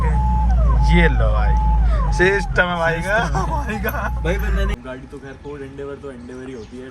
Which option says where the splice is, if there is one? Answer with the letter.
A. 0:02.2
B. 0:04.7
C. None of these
B